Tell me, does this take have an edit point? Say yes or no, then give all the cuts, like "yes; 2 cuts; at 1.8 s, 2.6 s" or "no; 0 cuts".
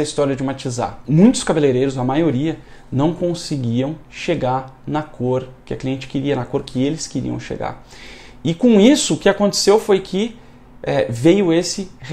yes; 1 cut; at 1.0 s